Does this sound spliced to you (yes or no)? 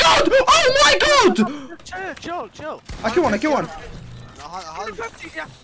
no